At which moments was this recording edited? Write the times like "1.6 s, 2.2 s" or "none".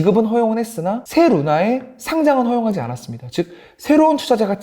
1.0 s